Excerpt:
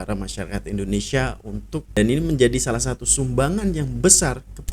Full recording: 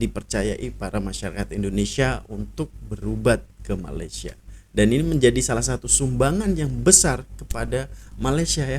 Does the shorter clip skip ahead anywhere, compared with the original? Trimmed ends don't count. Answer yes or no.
yes